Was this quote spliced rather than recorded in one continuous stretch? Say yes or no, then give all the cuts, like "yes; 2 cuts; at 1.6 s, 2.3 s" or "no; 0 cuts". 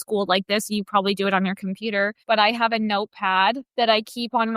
yes; 2 cuts; at 2.2 s, 3.7 s